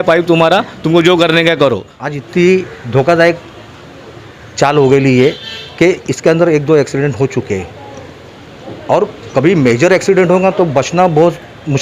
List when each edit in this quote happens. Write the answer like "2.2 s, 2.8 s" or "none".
1.9 s